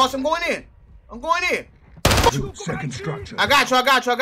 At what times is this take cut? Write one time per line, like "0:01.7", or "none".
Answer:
0:02.3